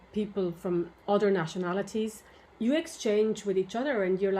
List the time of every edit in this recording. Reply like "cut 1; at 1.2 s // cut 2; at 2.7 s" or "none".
cut 1; at 1.0 s // cut 2; at 2.4 s